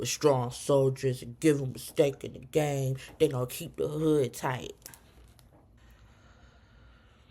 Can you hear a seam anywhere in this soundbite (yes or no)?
yes